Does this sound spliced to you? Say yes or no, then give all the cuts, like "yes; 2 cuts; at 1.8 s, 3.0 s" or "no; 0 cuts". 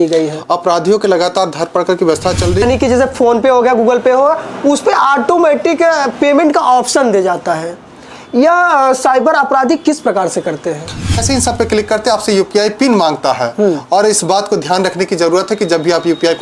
yes; 2 cuts; at 2.6 s, 11.2 s